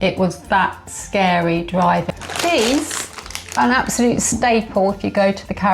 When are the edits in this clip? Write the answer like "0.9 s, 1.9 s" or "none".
2.1 s